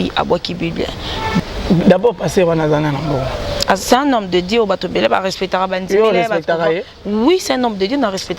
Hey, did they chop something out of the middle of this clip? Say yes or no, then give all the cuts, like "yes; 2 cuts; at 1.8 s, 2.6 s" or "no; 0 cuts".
yes; 1 cut; at 1.4 s